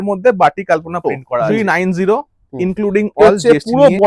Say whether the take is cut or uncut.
cut